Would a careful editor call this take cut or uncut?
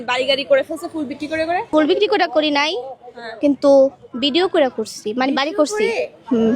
cut